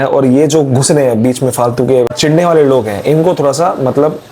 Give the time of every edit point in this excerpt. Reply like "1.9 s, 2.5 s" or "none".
2.2 s